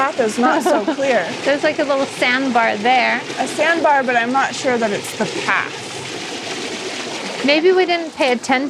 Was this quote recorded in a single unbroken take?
yes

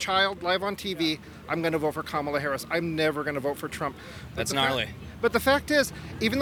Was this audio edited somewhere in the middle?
no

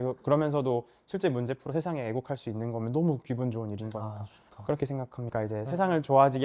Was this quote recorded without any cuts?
no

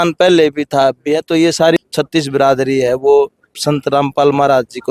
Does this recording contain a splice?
yes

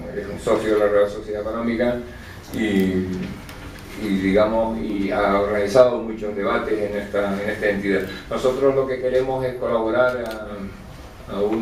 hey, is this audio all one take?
no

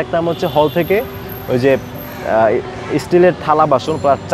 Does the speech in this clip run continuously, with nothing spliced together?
yes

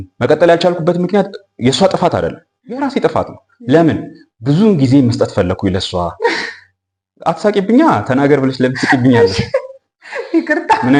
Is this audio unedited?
yes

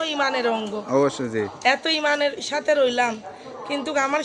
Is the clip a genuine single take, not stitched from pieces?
yes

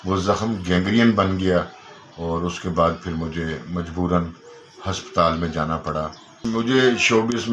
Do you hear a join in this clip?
yes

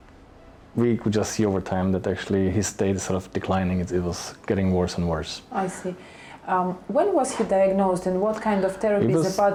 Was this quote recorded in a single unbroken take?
yes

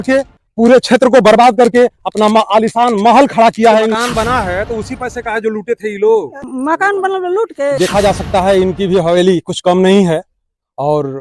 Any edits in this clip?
yes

